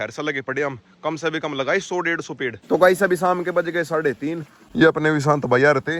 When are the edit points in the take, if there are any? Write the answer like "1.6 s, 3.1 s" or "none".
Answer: none